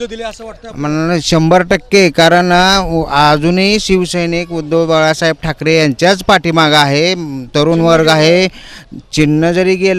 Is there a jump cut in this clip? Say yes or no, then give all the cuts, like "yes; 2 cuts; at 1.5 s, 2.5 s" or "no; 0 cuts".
no; 0 cuts